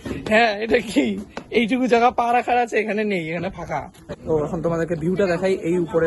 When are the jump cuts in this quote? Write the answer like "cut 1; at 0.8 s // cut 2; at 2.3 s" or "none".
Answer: cut 1; at 4.2 s